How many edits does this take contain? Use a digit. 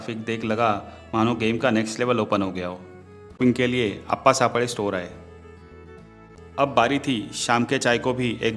2